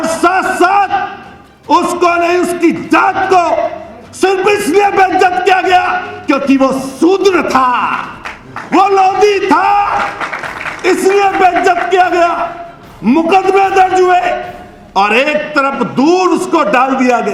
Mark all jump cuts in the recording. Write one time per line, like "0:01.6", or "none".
none